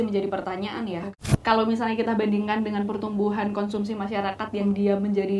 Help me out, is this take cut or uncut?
cut